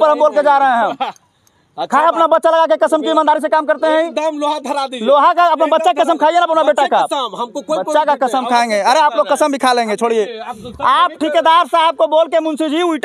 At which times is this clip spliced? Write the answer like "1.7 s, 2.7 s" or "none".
none